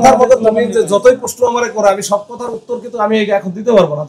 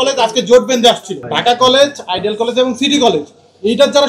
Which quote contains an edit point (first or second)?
second